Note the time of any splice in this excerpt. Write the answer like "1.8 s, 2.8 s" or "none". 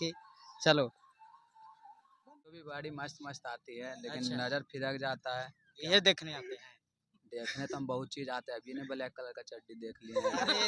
2.5 s